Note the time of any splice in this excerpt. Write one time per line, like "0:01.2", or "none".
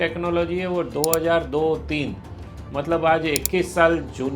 none